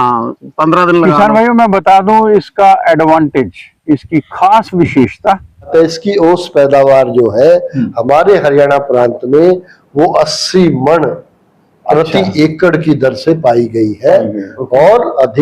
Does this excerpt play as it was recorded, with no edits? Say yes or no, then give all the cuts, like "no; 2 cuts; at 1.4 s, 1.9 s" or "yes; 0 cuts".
no; 1 cut; at 5.7 s